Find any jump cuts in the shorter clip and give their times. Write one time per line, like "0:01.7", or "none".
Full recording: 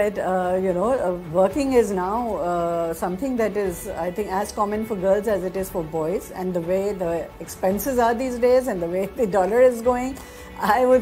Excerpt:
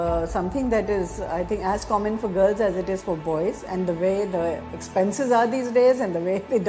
none

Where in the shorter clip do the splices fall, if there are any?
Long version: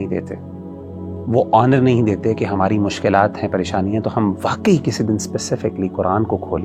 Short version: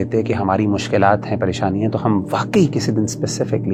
none

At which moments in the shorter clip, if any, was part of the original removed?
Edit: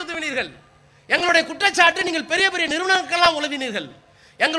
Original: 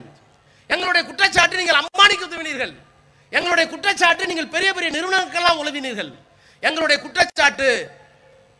none

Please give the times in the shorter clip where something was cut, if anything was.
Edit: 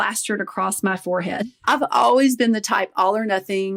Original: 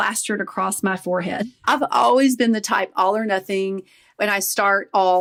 none

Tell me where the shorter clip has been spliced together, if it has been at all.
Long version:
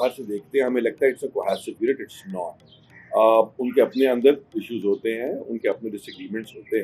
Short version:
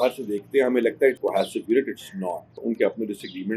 0:01.2
0:02.6

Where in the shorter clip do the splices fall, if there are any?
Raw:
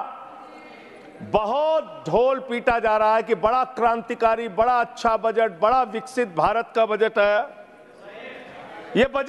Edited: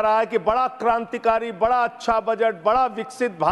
none

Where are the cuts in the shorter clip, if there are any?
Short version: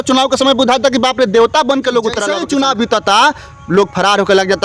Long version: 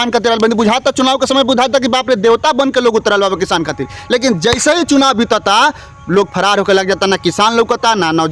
0:02.3

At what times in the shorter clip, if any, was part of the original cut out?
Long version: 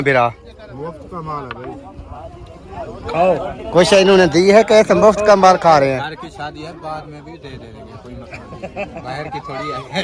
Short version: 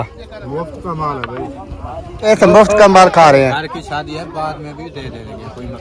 0:02.2

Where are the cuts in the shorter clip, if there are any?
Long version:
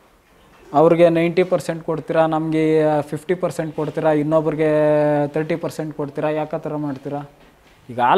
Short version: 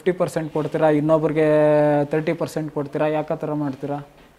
none

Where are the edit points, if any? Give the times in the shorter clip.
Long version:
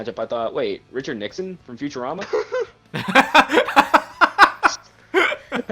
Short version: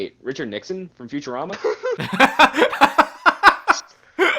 0:02.0

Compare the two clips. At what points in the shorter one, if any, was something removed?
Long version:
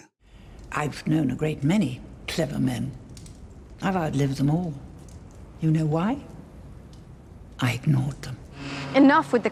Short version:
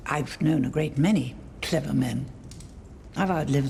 none

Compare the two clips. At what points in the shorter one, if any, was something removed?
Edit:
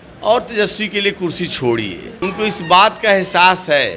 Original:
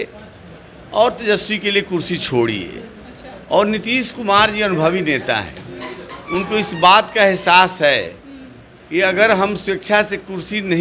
0:02.1

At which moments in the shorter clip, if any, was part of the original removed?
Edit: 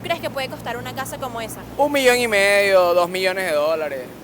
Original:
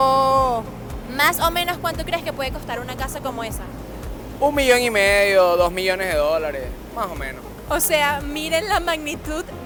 0:01.6

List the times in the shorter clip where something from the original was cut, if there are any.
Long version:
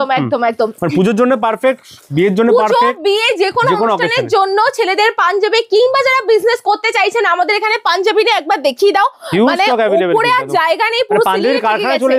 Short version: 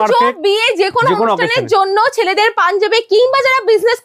none

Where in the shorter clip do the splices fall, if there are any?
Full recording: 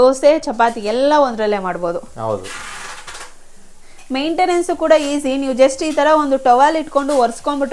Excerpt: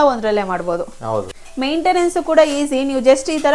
0:01.4

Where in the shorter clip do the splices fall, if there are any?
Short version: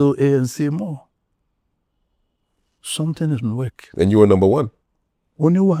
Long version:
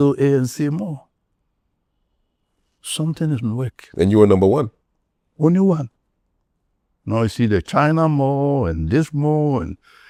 none

